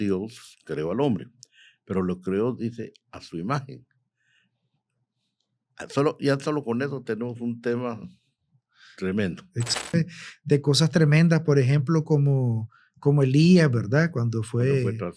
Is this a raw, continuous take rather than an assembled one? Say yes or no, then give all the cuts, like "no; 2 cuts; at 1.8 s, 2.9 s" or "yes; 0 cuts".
no; 1 cut; at 9.9 s